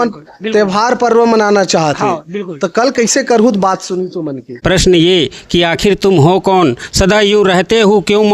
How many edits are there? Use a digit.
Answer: 1